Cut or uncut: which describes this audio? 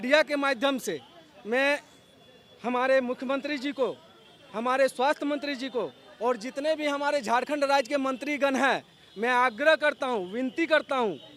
uncut